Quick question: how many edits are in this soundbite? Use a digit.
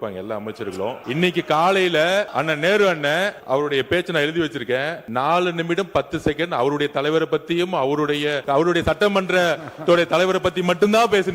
5